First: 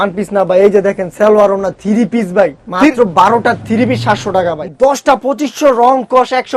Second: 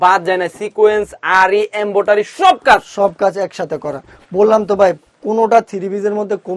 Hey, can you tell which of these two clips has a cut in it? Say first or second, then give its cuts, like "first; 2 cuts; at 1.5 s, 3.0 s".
first; 1 cut; at 4.7 s